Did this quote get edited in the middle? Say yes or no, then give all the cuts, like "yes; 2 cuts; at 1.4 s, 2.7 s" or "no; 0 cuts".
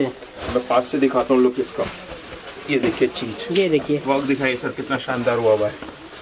no; 0 cuts